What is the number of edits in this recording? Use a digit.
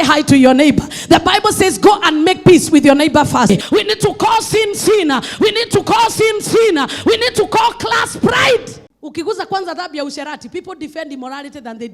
2